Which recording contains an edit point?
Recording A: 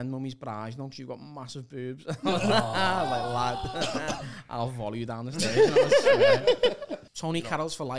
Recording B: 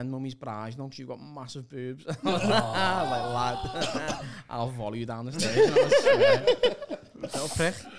A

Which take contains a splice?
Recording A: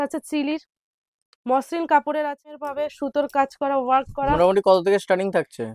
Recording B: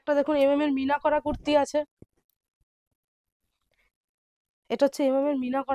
A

